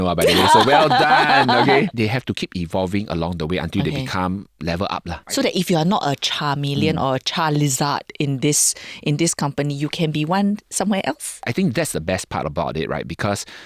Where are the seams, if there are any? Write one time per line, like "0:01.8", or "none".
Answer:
0:01.9
0:05.2
0:11.4